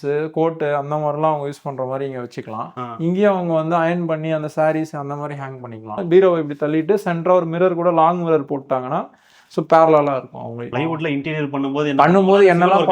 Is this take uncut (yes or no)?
no